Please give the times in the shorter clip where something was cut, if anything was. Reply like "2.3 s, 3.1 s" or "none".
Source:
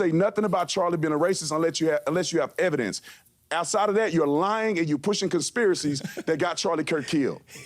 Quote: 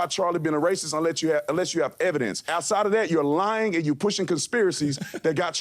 2.4 s